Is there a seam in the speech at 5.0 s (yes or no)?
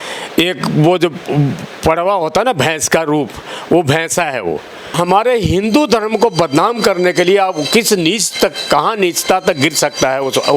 yes